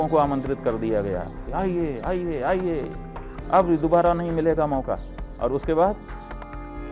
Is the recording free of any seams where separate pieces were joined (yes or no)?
yes